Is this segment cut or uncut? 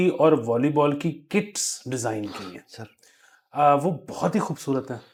uncut